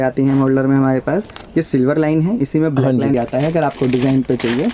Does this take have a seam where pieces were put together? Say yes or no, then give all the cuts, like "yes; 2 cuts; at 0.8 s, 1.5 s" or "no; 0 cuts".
yes; 1 cut; at 3.1 s